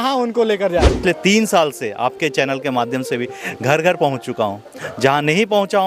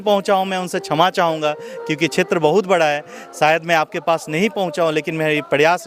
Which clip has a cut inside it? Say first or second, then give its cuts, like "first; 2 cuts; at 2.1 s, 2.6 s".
first; 1 cut; at 1.0 s